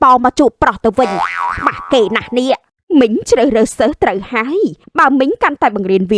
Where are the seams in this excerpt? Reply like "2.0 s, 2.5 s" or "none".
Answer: 2.6 s